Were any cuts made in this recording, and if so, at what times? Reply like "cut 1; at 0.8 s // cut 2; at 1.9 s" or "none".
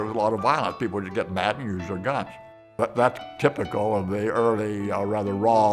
cut 1; at 2.8 s